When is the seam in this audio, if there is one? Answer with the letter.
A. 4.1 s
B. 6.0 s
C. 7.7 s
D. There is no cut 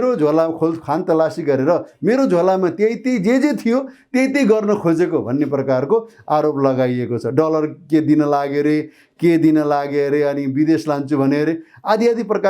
D